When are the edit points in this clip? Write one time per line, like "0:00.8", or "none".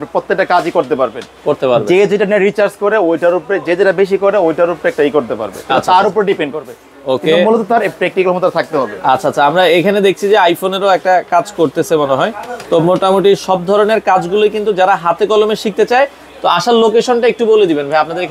none